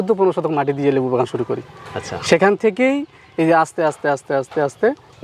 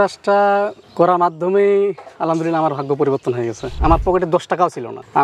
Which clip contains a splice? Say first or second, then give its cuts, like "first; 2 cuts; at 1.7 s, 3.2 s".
second; 1 cut; at 3.7 s